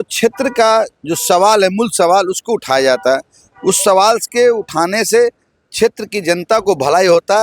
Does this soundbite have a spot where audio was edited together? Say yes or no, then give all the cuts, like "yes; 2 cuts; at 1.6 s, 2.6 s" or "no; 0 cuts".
no; 0 cuts